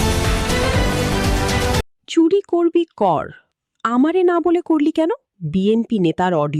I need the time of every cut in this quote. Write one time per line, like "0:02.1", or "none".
0:05.3